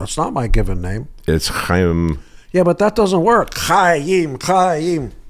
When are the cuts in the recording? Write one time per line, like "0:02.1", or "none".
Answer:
none